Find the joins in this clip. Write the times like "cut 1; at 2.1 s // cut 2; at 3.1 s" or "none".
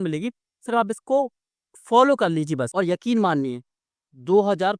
cut 1; at 2.7 s